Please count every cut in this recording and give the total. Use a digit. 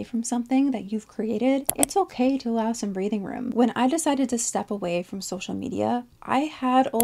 2